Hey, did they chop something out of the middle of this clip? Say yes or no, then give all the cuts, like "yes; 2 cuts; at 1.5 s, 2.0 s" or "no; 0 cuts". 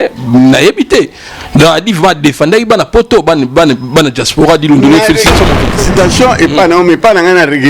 yes; 1 cut; at 5.8 s